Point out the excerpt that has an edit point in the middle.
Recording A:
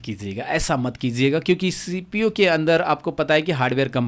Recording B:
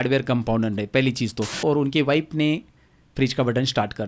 B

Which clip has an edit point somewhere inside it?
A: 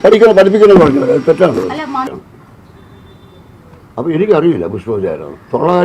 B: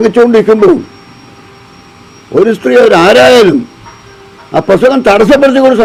A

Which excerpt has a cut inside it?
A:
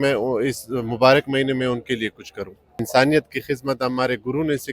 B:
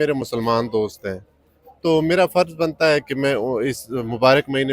A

